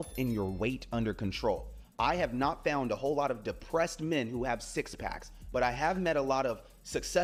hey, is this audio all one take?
yes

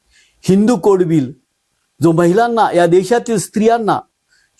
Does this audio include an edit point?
no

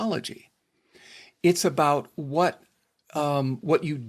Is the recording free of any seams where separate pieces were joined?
yes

